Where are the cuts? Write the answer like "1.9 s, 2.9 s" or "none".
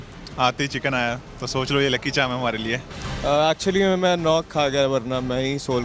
3.0 s